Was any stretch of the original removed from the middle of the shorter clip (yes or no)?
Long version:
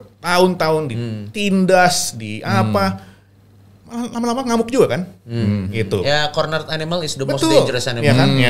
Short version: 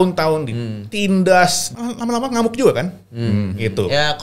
yes